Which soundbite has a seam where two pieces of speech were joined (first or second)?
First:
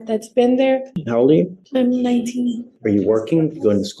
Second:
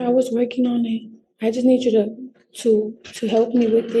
first